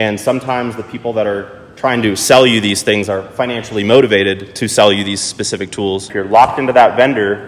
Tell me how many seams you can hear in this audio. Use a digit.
1